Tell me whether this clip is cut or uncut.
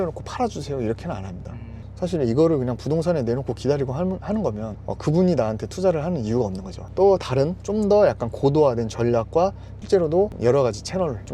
cut